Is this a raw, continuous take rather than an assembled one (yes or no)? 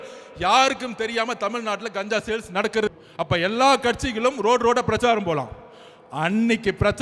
no